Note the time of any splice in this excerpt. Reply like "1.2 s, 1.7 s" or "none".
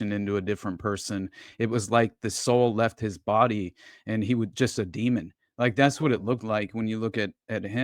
none